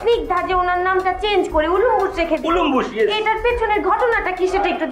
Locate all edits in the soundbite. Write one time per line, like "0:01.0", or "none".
none